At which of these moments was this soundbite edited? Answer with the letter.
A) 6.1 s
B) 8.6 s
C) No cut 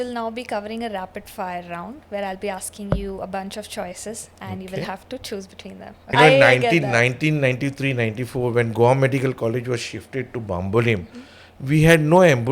A